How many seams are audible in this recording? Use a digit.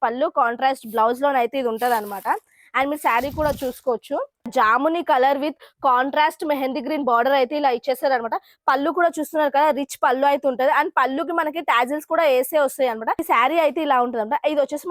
2